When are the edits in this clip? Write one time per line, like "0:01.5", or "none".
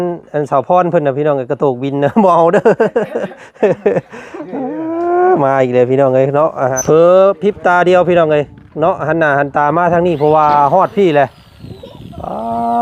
0:06.8